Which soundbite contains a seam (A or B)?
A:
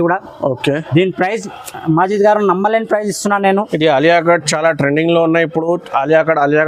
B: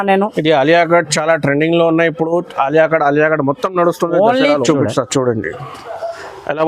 B